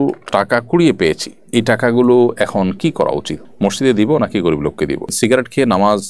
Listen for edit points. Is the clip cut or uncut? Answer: cut